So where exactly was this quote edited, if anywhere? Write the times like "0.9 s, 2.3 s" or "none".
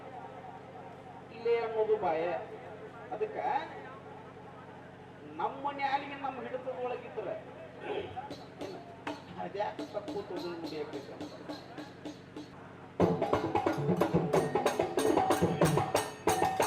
12.5 s